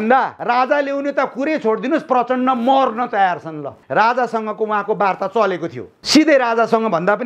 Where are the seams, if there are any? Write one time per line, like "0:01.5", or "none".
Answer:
0:03.7